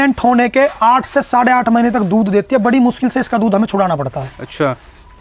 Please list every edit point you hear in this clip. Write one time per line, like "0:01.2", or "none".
none